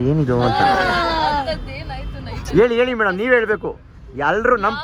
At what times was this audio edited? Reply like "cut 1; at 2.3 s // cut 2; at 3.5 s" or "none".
none